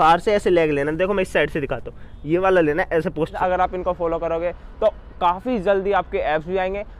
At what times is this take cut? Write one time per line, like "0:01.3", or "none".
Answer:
0:03.3

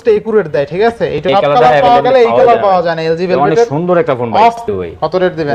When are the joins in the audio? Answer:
0:01.2
0:04.6

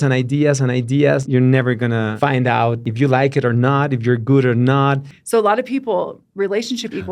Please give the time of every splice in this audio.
0:01.2
0:02.1
0:02.9
0:05.1

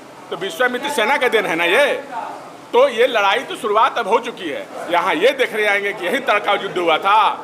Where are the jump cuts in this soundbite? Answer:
0:04.7

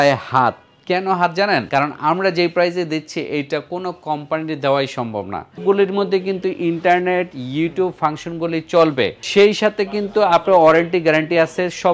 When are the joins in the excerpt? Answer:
0:01.7
0:05.6
0:09.2

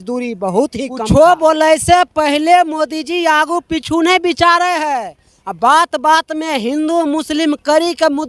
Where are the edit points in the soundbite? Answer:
0:01.0

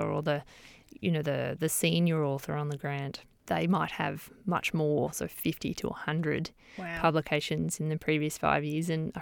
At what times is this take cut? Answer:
0:03.4

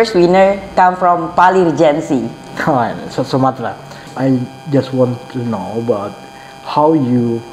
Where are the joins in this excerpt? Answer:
0:04.1

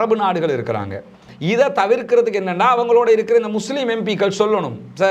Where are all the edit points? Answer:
0:01.1

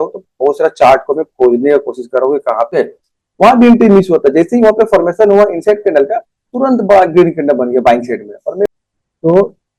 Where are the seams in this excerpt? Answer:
0:02.8
0:08.7

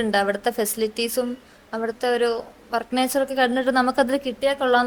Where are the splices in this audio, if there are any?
none

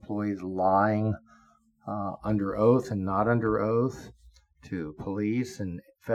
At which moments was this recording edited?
none

